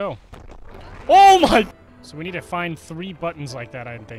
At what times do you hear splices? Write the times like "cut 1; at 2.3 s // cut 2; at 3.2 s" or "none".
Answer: cut 1; at 1.7 s